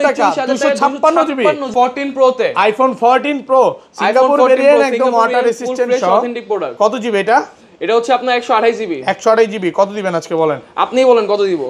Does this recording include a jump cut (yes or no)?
yes